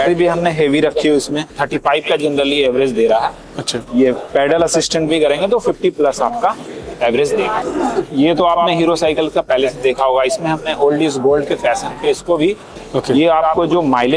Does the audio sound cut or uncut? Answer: cut